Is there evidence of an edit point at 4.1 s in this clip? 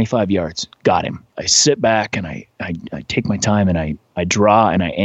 no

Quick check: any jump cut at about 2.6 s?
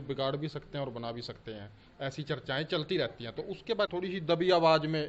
no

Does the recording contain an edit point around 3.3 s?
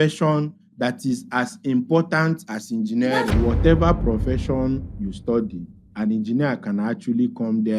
yes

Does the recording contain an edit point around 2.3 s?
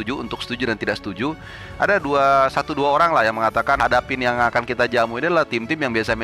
no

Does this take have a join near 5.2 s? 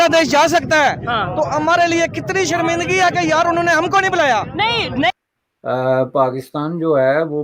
yes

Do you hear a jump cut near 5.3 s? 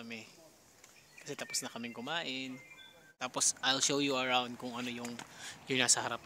no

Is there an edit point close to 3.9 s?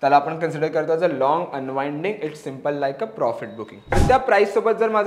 yes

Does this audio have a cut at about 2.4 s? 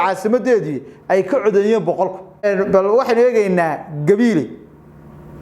yes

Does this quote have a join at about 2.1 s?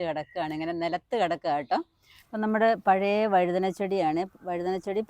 yes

